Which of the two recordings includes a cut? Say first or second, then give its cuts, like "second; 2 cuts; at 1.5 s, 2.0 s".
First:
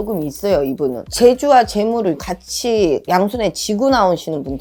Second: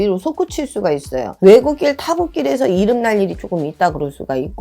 second; 1 cut; at 1.3 s